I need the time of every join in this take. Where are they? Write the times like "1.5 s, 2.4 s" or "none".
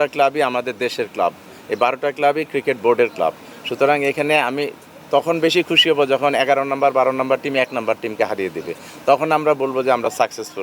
none